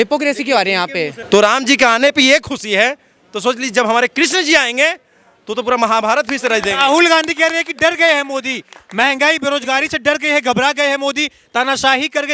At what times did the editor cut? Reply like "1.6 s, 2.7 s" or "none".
1.2 s

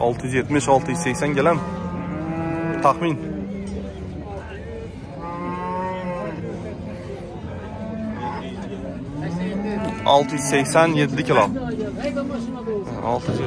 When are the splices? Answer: none

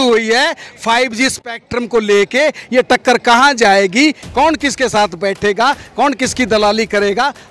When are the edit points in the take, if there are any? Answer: none

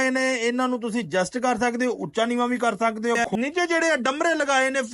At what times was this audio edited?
3.2 s

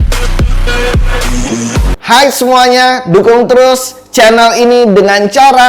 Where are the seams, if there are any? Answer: 1.9 s

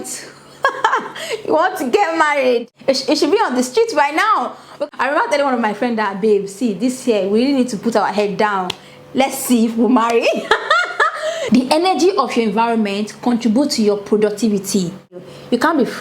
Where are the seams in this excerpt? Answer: 2.7 s, 4.8 s, 11.4 s, 15.1 s

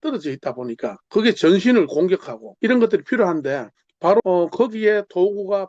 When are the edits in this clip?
0.9 s, 2.4 s, 4.2 s

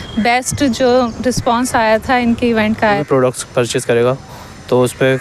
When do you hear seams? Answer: 2.8 s

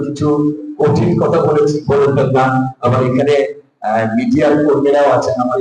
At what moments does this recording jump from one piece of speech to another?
none

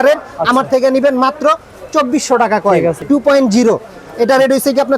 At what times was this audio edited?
3.0 s

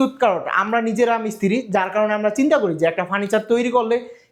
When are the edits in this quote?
none

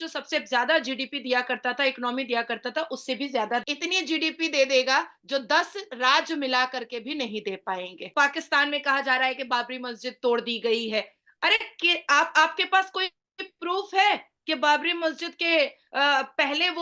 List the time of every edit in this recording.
3.6 s, 8.0 s

